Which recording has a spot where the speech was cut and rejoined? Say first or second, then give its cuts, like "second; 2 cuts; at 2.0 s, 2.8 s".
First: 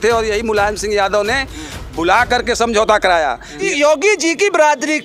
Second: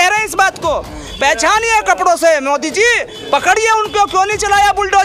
first; 1 cut; at 3.6 s